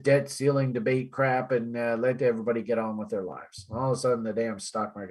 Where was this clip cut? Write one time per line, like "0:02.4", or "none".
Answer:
none